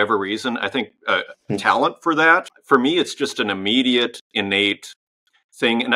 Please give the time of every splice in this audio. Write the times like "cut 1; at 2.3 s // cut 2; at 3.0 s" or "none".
cut 1; at 2.4 s